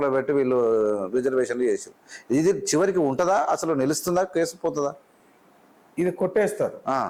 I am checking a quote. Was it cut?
no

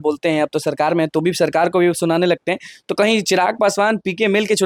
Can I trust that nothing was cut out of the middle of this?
yes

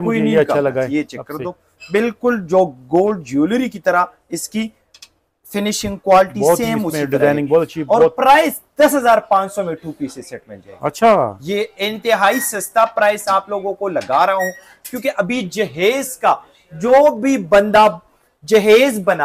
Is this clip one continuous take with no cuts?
yes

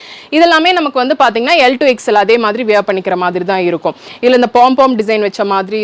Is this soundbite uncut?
yes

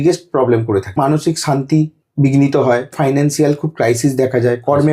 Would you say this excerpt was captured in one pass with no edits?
no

